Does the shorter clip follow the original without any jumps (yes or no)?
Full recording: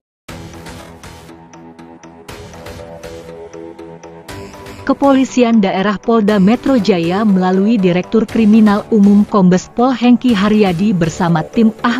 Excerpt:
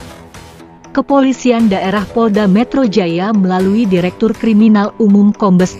no